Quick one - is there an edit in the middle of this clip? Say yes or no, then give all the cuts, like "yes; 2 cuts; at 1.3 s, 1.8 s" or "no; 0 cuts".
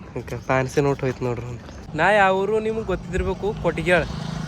yes; 1 cut; at 1.8 s